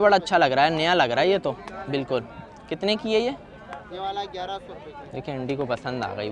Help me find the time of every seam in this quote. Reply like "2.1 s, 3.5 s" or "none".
none

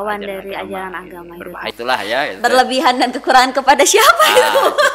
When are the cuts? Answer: 1.7 s

